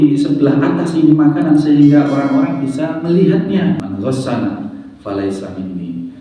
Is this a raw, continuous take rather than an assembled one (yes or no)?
no